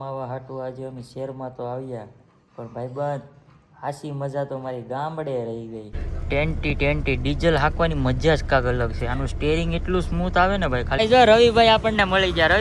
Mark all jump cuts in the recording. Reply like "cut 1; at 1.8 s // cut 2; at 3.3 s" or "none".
cut 1; at 5.9 s // cut 2; at 11.0 s

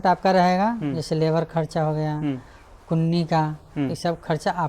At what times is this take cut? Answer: none

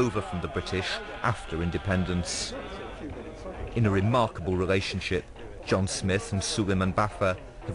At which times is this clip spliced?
cut 1; at 2.8 s

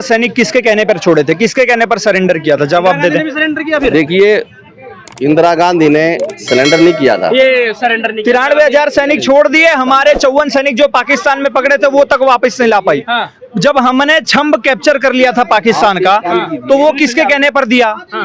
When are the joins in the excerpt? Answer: none

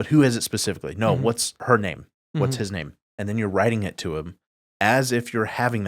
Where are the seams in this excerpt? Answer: cut 1; at 1.6 s // cut 2; at 3.0 s

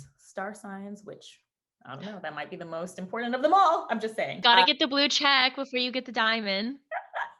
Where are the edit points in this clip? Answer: cut 1; at 4.4 s

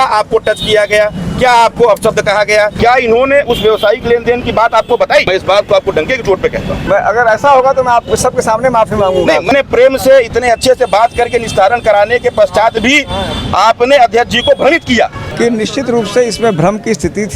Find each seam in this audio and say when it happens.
cut 1; at 2.7 s // cut 2; at 5.3 s // cut 3; at 6.9 s // cut 4; at 9.5 s // cut 5; at 15.2 s

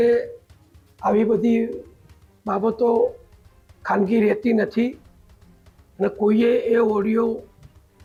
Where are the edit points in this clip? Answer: none

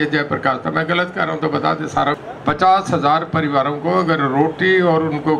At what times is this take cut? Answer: cut 1; at 2.2 s

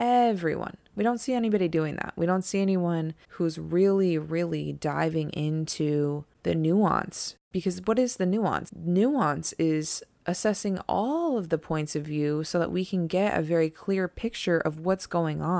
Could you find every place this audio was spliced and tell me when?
cut 1; at 3.2 s // cut 2; at 6.3 s // cut 3; at 7.5 s // cut 4; at 8.7 s

